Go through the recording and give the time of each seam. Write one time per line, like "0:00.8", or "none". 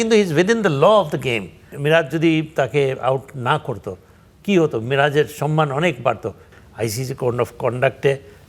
0:01.7
0:06.5